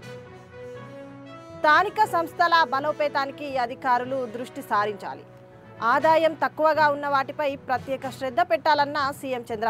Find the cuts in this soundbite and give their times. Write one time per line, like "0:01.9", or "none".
0:01.2